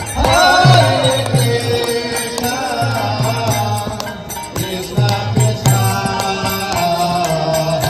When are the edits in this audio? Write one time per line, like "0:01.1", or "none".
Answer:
none

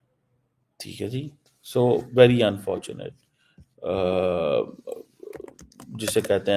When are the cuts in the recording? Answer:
none

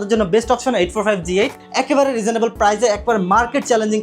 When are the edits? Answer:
0:01.6

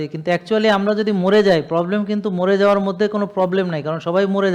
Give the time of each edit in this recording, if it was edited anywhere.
none

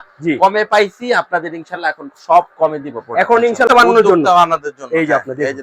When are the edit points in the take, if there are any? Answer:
0:03.7

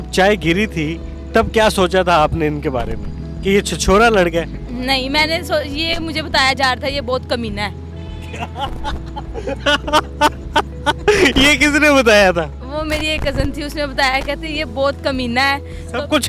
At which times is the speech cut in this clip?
none

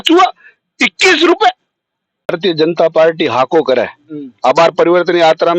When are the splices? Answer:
0:02.3

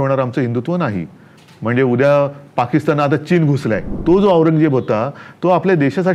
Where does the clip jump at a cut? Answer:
0:03.9

